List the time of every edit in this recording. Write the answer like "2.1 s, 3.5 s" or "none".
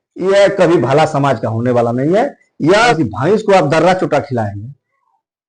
2.9 s